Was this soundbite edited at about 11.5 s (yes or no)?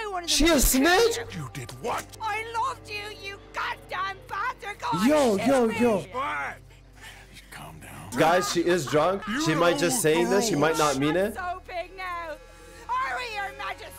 no